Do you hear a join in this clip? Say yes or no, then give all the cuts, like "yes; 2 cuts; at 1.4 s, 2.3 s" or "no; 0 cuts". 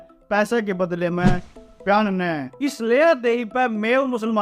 no; 0 cuts